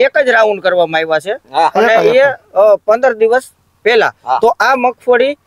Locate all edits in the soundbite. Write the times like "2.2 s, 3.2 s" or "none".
none